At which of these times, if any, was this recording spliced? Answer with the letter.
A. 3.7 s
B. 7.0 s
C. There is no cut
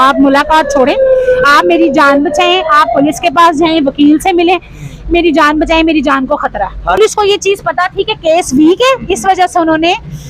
B